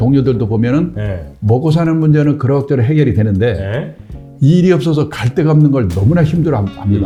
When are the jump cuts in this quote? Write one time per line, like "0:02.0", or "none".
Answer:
none